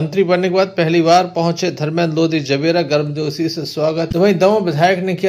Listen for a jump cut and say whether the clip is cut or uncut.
uncut